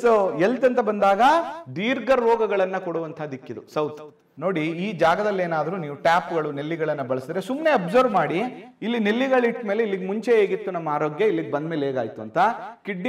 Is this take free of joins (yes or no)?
no